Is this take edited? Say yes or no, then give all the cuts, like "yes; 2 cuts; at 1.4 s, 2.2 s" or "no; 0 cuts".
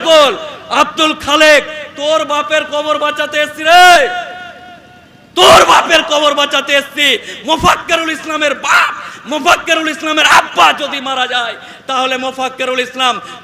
no; 0 cuts